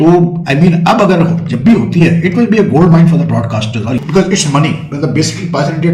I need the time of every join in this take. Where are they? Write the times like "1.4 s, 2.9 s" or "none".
3.9 s